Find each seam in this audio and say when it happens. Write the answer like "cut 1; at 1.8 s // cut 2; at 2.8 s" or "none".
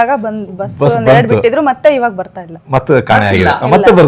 none